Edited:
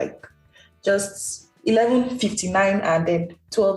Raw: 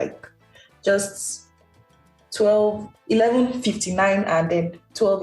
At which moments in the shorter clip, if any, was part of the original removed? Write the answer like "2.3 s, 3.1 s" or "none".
1.5 s